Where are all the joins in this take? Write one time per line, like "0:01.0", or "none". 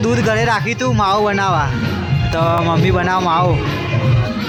none